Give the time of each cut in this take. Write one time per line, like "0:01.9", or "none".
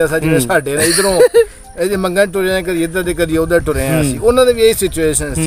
none